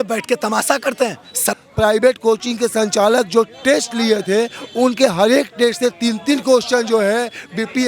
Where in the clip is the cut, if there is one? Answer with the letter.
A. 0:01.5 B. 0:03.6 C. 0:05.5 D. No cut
A